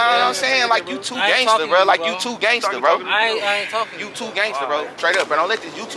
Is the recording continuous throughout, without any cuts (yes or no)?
no